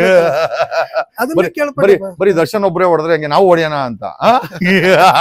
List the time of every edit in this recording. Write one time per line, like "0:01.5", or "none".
none